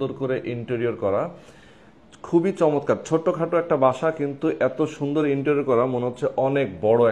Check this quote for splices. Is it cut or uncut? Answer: uncut